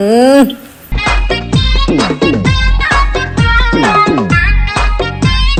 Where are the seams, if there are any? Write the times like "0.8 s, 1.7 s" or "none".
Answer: none